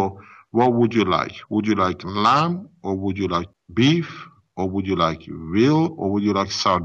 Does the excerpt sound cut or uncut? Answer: cut